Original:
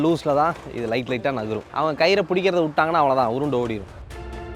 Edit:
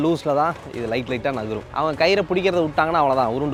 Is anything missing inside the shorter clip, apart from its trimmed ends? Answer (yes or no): no